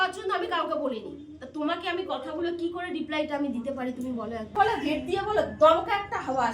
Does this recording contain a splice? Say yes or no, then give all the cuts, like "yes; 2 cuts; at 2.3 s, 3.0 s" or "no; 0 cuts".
yes; 1 cut; at 4.5 s